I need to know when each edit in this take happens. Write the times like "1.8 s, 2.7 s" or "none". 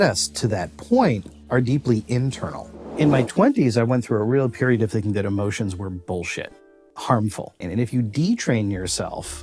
2.9 s, 6.8 s, 7.5 s